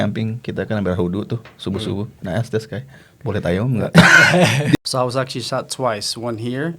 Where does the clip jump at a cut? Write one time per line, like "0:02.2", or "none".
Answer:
0:04.8